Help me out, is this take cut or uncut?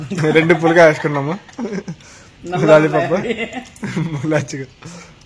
uncut